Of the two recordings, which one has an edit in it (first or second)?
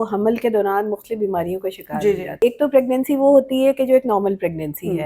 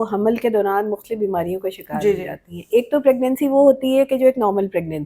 first